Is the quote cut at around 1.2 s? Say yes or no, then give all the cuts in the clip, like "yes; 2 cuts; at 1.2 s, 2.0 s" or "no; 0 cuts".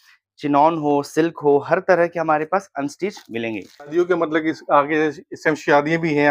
no; 1 cut; at 3.9 s